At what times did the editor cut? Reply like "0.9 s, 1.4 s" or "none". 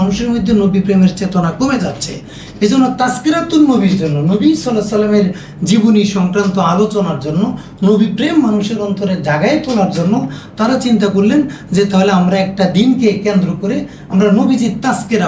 none